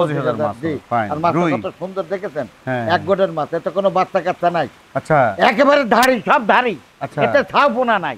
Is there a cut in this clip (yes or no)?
no